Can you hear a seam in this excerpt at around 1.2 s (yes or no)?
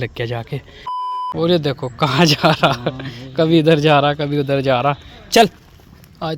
yes